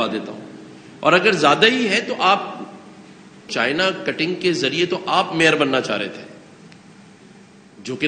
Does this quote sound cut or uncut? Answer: cut